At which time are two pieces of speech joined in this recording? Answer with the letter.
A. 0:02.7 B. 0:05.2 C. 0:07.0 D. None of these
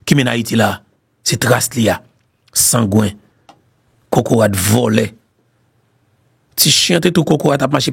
D